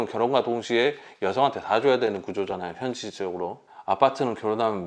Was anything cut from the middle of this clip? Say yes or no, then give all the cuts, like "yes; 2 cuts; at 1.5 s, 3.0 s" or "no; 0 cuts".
yes; 1 cut; at 3.6 s